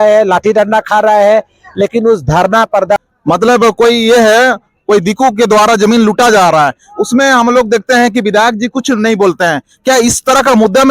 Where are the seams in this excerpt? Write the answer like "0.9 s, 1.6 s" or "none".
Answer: 3.0 s